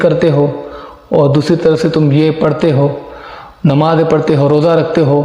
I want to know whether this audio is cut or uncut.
uncut